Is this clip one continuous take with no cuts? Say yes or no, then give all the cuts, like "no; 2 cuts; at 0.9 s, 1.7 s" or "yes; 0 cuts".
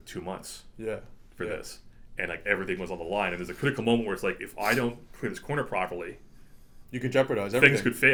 yes; 0 cuts